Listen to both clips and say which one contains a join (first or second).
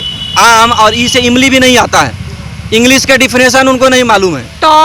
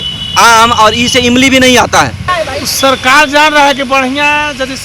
second